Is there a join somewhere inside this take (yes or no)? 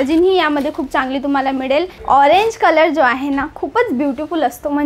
yes